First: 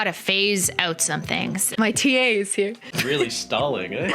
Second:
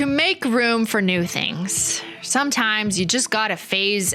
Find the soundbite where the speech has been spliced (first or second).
first